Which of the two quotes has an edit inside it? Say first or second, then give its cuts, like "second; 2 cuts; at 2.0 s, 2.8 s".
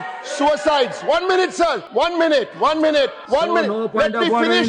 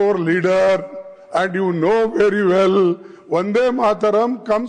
first; 2 cuts; at 1.8 s, 3.2 s